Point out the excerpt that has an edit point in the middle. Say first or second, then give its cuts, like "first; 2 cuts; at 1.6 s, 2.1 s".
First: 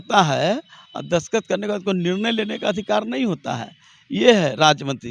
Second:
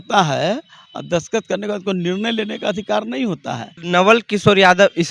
second; 1 cut; at 3.7 s